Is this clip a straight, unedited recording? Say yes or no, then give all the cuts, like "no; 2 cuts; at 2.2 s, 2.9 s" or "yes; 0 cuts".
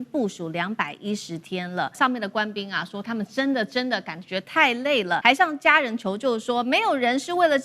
no; 2 cuts; at 2.0 s, 5.2 s